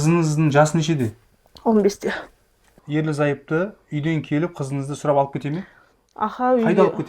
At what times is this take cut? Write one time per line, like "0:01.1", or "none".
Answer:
0:02.7